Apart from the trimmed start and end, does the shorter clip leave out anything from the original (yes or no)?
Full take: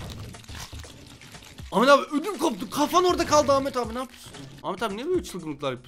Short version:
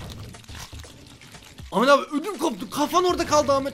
no